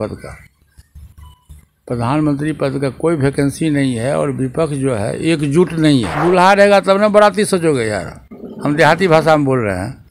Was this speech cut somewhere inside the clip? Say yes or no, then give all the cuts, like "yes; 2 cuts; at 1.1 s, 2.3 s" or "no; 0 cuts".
yes; 1 cut; at 6.1 s